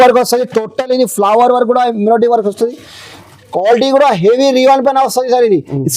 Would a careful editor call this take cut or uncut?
uncut